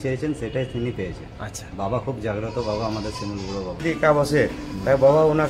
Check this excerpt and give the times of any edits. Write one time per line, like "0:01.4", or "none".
0:03.8